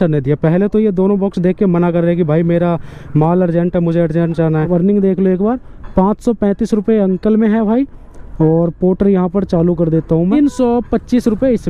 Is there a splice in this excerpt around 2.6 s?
no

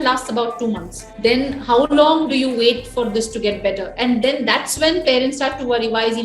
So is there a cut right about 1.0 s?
yes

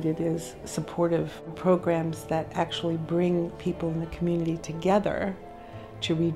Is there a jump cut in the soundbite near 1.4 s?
yes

